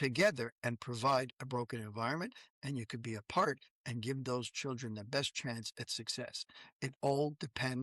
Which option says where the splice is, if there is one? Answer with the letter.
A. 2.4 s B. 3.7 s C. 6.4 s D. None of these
D